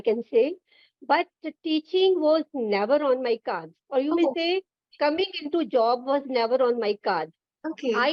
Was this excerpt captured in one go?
yes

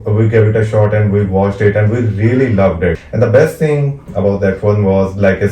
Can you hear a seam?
yes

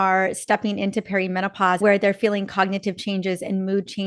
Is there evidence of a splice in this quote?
yes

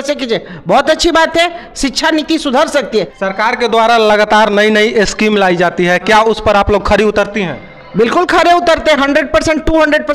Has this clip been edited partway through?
yes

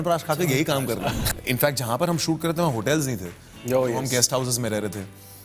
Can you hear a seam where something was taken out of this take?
yes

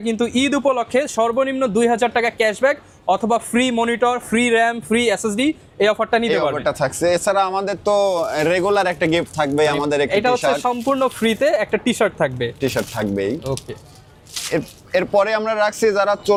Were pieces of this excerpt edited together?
no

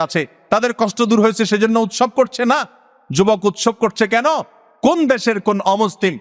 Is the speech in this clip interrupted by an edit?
no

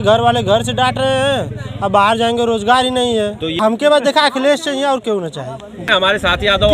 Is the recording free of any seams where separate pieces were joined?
no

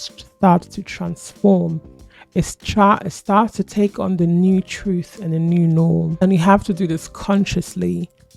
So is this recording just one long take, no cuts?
yes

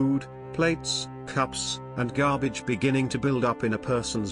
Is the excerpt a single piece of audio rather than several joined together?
yes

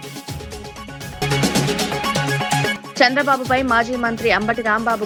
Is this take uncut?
yes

